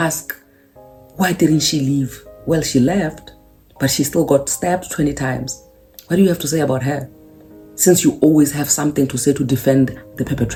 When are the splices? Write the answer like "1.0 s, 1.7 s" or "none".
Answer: none